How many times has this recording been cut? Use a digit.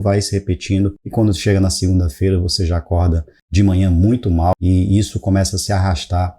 2